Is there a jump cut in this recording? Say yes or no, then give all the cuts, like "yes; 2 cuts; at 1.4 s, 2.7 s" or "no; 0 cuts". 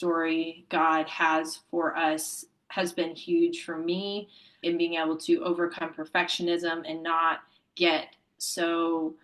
yes; 1 cut; at 4.6 s